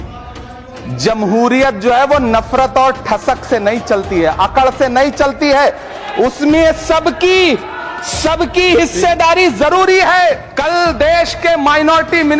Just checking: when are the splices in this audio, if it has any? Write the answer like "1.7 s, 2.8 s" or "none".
10.5 s